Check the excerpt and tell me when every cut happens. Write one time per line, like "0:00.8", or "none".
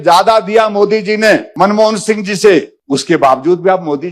0:01.5
0:02.8